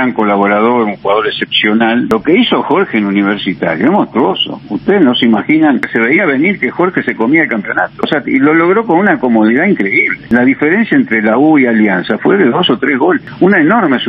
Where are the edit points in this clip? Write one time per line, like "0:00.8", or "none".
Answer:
0:02.1
0:05.9
0:08.1
0:10.2
0:13.3